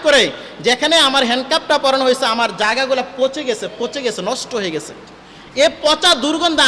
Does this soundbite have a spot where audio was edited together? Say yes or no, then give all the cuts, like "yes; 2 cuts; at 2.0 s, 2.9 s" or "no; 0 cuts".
no; 0 cuts